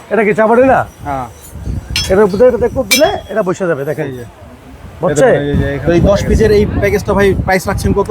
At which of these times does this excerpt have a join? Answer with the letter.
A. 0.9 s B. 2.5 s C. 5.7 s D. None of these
C